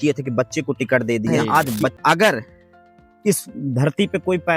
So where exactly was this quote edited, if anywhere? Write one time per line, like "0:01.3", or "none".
0:02.0